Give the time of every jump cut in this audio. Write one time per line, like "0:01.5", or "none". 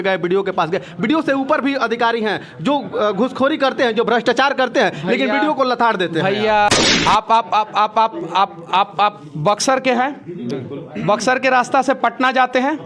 0:06.7